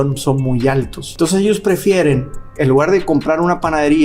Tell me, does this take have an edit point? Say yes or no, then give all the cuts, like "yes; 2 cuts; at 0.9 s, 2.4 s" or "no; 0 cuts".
yes; 1 cut; at 1.0 s